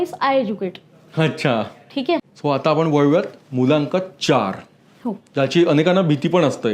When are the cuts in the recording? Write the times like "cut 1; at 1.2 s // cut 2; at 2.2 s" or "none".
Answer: cut 1; at 2.3 s